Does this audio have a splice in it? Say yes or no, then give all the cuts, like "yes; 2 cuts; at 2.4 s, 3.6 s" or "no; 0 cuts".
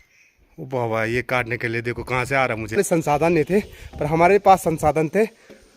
yes; 1 cut; at 2.8 s